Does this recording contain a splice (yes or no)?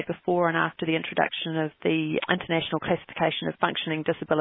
no